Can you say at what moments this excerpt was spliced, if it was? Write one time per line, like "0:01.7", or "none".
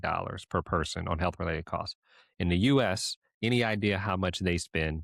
none